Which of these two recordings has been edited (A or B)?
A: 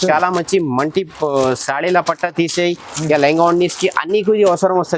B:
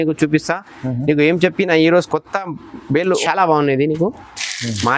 B